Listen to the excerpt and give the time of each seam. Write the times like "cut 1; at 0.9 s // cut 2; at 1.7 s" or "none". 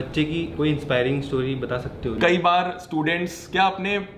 cut 1; at 2.1 s